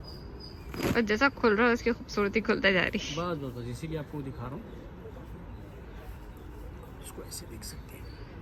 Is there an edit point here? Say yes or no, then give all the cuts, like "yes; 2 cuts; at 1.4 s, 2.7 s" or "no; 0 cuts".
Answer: no; 0 cuts